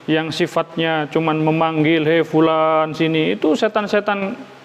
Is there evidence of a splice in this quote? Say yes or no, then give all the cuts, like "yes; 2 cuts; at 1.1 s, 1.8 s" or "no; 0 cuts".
no; 0 cuts